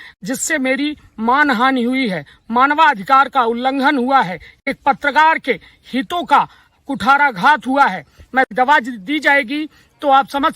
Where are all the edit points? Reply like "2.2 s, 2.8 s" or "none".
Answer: 8.5 s